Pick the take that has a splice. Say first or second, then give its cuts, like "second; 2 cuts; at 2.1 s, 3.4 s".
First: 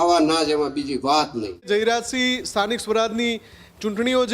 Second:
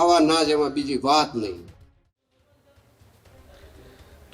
first; 1 cut; at 1.7 s